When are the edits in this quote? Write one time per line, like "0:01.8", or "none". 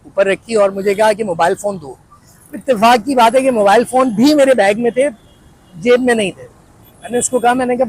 none